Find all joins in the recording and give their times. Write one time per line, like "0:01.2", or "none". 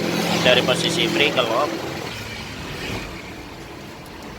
0:02.1